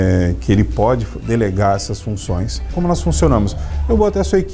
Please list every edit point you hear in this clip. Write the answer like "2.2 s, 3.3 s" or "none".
2.7 s